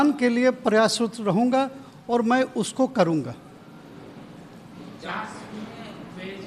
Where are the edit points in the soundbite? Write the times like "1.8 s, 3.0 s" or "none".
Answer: none